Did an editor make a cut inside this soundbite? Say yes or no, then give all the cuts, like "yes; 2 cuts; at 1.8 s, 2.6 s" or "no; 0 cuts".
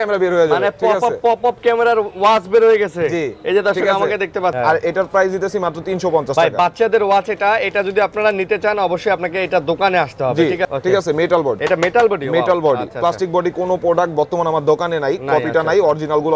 yes; 3 cuts; at 4.5 s, 10.7 s, 11.6 s